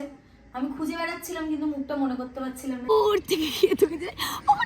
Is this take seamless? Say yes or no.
no